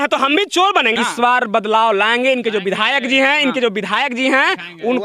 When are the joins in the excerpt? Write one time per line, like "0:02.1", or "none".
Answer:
0:00.9